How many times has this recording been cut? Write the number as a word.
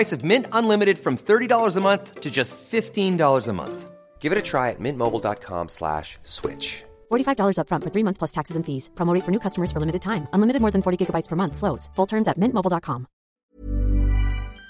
one